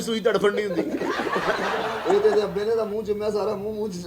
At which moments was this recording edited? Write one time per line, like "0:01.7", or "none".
0:02.0